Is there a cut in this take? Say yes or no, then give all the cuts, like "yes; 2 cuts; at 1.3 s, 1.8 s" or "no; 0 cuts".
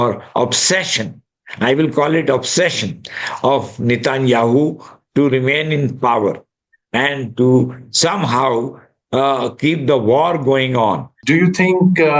yes; 1 cut; at 11.1 s